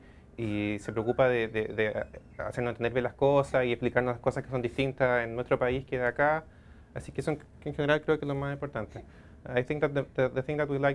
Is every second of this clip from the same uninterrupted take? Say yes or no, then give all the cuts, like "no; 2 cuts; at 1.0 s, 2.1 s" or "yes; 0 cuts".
yes; 0 cuts